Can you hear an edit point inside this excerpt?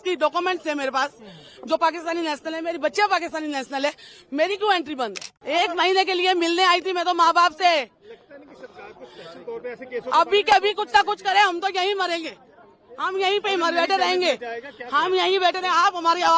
yes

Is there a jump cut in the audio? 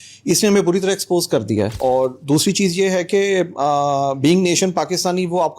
yes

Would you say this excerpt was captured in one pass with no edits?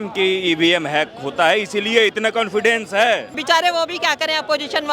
no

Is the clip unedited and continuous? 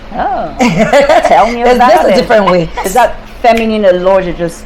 no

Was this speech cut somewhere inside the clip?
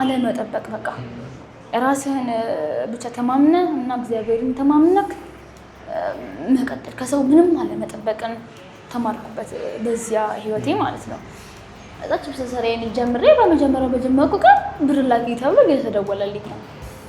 no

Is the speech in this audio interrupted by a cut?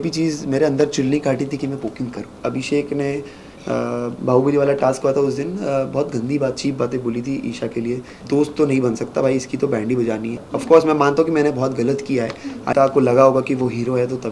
yes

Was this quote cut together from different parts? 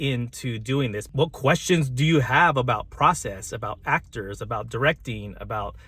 yes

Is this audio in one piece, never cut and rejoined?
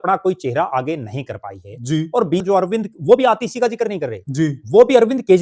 no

